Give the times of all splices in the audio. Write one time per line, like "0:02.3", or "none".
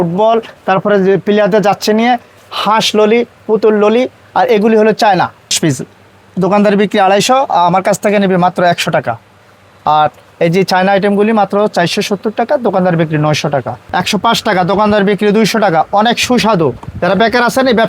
0:05.6
0:13.8